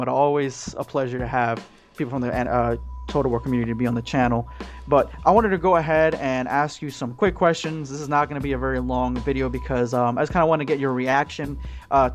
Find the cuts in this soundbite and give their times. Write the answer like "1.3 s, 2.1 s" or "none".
8.4 s